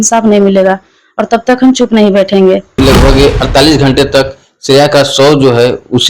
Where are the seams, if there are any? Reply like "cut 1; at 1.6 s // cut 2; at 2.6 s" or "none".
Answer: cut 1; at 2.8 s